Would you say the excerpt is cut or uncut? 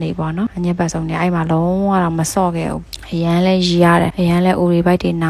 uncut